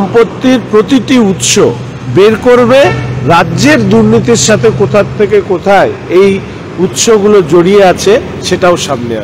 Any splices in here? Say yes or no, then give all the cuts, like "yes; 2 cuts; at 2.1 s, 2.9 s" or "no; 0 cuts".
no; 0 cuts